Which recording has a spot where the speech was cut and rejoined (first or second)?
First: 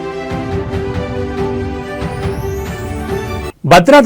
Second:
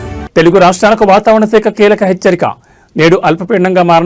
first